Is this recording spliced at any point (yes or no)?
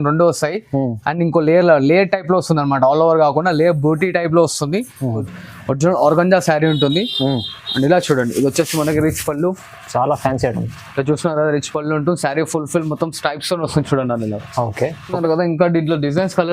yes